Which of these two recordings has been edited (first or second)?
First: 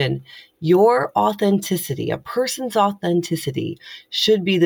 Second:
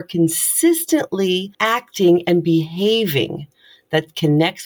second